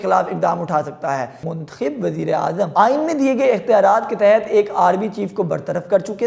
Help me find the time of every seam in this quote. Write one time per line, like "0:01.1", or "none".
0:01.4
0:02.7